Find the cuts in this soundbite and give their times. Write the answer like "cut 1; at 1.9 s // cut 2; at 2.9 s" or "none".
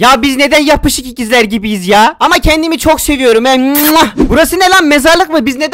cut 1; at 4.1 s